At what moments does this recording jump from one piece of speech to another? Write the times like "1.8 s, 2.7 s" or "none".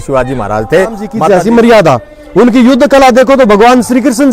1.1 s